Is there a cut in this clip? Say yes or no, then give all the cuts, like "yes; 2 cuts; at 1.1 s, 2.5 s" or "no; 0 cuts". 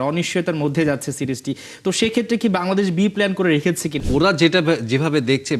yes; 1 cut; at 4.0 s